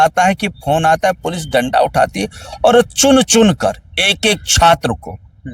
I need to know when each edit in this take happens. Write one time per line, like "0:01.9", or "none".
none